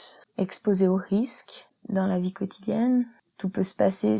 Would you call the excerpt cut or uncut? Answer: uncut